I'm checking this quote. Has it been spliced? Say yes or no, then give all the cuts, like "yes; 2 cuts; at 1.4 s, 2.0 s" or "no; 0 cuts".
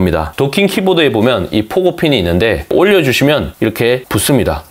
no; 0 cuts